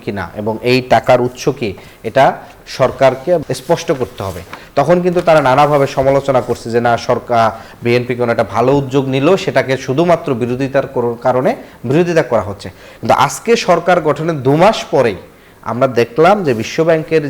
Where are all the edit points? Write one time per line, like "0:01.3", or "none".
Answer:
0:03.4